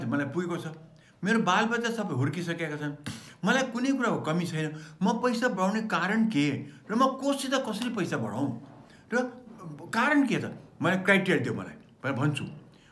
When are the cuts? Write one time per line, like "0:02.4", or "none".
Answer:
none